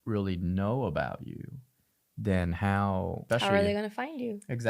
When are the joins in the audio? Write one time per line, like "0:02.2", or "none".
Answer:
0:03.2